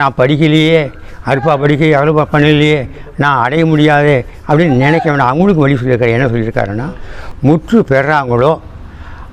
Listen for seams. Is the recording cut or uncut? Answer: cut